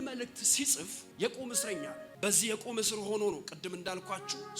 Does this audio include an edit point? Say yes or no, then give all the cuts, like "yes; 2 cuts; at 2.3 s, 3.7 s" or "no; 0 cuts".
yes; 2 cuts; at 1.0 s, 2.1 s